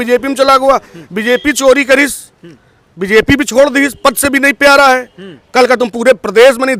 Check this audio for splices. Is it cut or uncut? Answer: uncut